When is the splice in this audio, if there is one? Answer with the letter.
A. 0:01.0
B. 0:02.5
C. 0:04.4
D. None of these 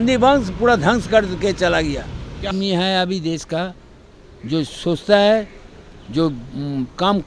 B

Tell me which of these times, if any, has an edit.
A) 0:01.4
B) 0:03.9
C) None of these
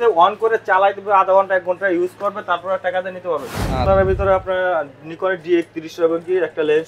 B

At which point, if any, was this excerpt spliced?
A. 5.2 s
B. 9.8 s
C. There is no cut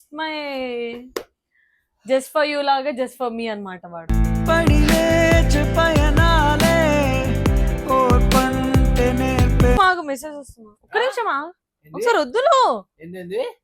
B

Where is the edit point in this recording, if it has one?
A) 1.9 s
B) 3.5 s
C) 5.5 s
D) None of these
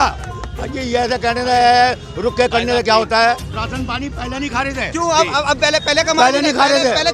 B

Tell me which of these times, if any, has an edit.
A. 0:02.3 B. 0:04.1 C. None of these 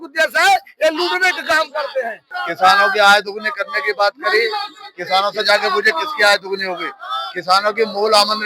A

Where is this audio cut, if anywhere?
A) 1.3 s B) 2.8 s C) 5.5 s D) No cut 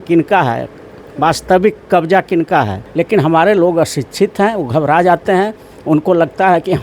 B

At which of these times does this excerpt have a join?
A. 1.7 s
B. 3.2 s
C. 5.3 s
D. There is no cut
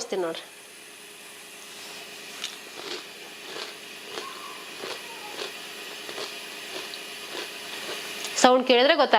D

